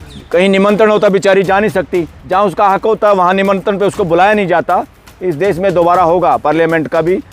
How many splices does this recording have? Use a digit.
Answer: 1